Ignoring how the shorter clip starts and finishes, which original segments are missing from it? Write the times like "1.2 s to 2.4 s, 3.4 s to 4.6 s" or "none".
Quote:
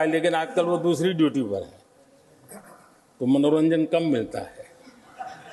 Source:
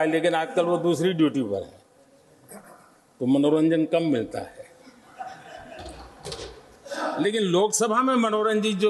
none